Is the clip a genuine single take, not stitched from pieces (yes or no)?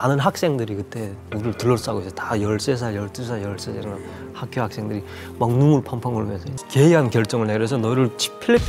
no